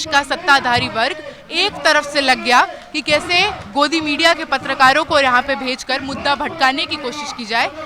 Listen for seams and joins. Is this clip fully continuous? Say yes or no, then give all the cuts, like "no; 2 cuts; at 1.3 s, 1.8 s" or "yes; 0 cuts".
yes; 0 cuts